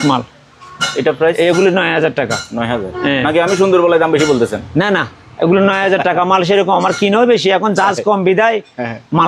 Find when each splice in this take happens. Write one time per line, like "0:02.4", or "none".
none